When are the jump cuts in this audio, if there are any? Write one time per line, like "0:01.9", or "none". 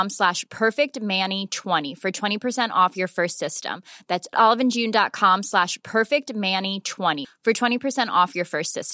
0:01.9